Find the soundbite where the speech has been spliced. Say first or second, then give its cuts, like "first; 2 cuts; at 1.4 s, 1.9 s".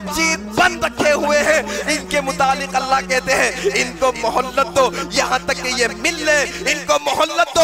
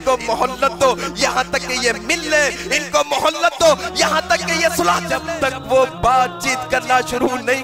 second; 1 cut; at 5.1 s